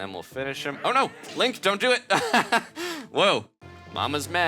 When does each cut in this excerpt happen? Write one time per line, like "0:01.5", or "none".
0:03.6